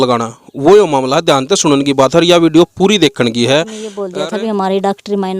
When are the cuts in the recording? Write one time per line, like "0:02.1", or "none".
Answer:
0:04.0